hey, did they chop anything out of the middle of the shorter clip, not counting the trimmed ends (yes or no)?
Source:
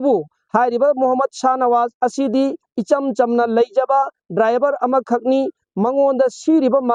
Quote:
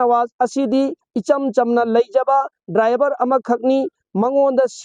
no